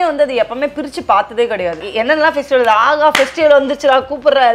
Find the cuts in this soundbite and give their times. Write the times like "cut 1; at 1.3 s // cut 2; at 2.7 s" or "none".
cut 1; at 1.8 s